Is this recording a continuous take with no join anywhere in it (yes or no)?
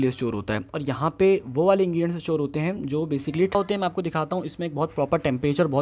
no